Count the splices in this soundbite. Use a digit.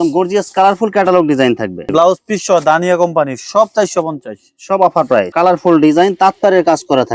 2